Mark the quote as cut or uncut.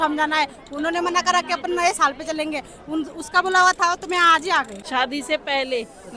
cut